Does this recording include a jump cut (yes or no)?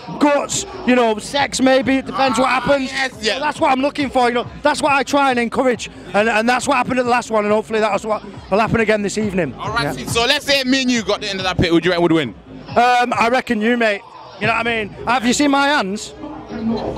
no